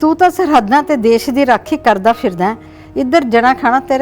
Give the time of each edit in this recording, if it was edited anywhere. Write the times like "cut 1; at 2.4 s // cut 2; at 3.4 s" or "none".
none